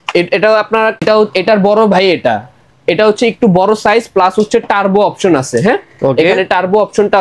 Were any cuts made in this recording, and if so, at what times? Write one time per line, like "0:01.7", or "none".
0:01.0